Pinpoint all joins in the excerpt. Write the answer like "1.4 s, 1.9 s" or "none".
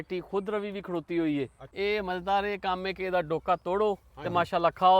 1.6 s